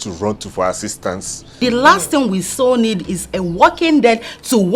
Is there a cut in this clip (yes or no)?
yes